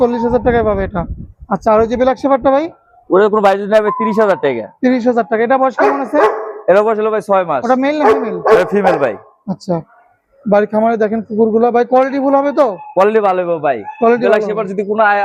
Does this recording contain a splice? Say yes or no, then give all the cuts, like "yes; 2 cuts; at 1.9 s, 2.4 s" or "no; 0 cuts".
no; 0 cuts